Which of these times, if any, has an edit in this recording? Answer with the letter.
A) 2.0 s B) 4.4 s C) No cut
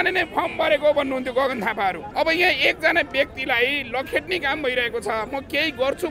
A